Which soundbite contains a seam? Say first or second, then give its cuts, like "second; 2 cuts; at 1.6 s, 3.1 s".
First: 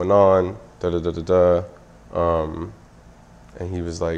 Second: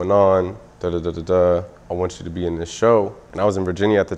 second; 2 cuts; at 1.8 s, 3.2 s